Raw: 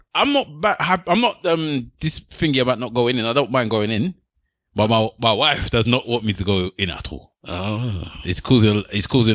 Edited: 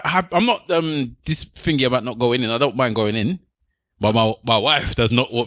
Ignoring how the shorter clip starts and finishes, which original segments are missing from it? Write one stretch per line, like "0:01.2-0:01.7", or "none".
none